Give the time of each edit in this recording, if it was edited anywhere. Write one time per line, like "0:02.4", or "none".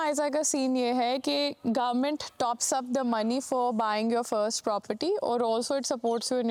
none